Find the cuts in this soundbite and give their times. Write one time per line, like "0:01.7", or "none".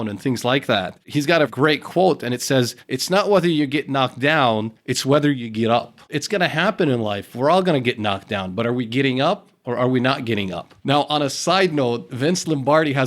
0:01.5
0:06.1